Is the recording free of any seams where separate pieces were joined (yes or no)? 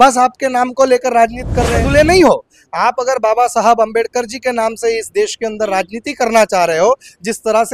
no